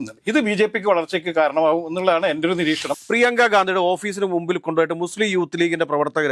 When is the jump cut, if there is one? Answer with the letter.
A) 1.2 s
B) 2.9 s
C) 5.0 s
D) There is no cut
B